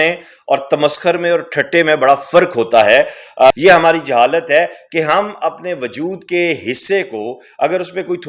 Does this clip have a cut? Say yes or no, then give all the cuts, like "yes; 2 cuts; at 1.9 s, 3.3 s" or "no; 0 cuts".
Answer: yes; 1 cut; at 3.5 s